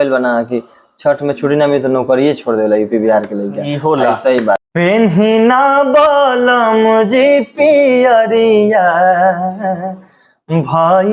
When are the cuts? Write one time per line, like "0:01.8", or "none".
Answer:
0:04.7